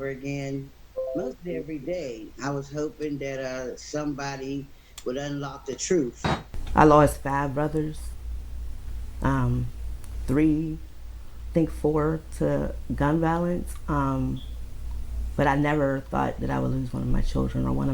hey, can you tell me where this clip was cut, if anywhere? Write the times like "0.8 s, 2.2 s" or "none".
2.3 s, 6.2 s